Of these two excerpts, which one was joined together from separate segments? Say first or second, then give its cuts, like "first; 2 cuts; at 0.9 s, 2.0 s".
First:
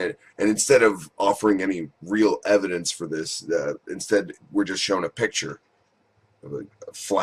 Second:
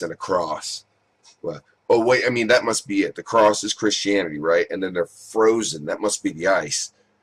second; 1 cut; at 4.2 s